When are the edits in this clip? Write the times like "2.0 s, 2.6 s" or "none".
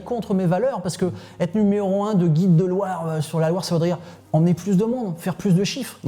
none